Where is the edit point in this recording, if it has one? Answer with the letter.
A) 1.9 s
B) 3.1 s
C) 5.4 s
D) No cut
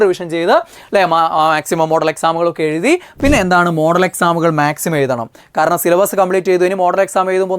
B